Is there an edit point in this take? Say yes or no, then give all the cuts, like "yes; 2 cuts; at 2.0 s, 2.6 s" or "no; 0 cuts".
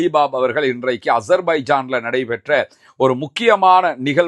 no; 0 cuts